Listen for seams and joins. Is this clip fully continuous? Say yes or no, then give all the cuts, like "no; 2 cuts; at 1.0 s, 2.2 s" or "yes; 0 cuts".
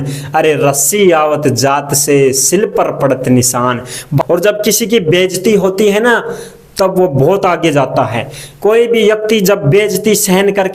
no; 1 cut; at 4.2 s